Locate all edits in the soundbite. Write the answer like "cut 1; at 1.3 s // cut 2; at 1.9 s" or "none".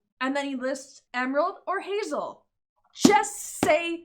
cut 1; at 1.0 s